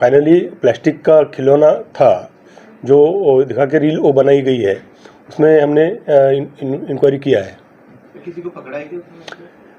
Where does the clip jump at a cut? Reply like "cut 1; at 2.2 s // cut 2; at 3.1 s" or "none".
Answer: none